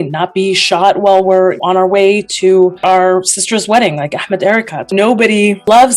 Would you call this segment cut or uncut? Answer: cut